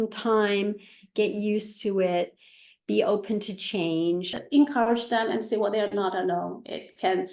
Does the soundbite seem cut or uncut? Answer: cut